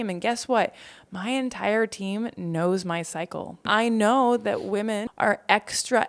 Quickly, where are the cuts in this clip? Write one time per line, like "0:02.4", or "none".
0:03.7
0:05.1